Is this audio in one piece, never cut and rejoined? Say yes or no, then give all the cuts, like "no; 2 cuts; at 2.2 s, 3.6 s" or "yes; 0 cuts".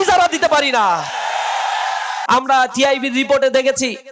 no; 1 cut; at 2.1 s